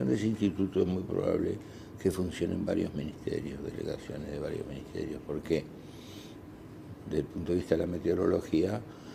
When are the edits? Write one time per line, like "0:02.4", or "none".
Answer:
none